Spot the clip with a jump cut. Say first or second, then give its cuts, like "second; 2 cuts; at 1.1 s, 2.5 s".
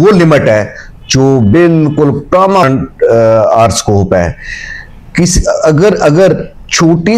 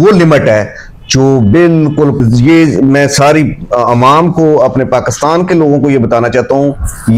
second; 1 cut; at 2.2 s